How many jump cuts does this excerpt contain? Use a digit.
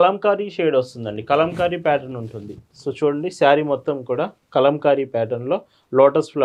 0